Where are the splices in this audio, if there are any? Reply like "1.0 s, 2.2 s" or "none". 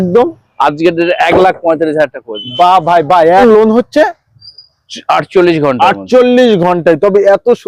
3.4 s